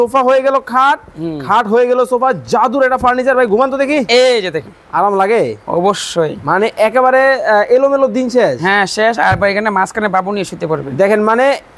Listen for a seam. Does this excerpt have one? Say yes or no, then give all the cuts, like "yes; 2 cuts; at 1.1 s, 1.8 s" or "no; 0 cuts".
no; 0 cuts